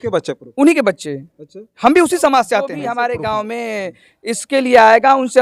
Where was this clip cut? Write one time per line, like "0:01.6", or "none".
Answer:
0:02.8